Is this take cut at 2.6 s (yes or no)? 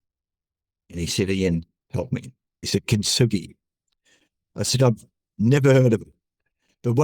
yes